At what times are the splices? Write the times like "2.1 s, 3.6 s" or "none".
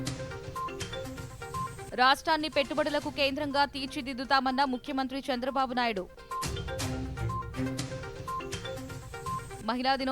1.5 s